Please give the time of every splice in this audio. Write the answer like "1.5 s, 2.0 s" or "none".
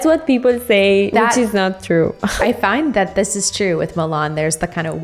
1.1 s, 2.4 s